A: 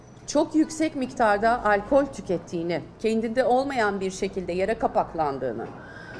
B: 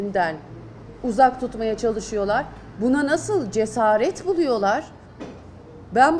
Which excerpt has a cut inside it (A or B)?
A